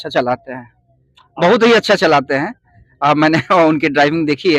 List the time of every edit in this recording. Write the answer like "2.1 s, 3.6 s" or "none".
none